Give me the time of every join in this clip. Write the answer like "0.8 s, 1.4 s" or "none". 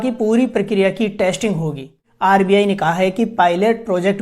2.0 s